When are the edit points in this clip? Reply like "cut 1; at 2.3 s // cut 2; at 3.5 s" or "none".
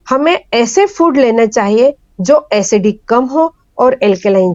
none